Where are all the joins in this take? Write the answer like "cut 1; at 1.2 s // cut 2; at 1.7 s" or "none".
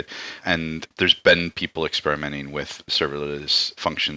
cut 1; at 0.9 s // cut 2; at 2.9 s